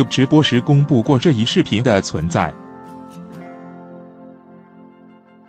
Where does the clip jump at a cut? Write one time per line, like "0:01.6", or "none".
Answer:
0:02.5